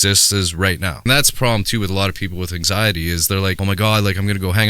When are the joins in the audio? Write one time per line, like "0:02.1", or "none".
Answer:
0:01.0
0:03.6